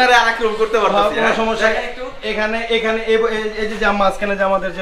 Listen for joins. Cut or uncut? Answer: uncut